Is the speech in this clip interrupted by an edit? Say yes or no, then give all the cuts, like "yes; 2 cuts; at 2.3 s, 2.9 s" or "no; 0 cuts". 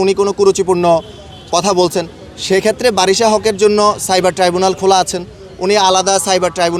no; 0 cuts